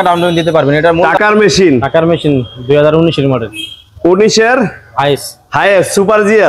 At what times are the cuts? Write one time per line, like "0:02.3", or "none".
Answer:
0:01.0